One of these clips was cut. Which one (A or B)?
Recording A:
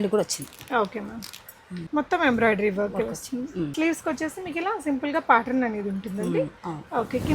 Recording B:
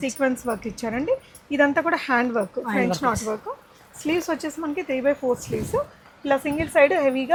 A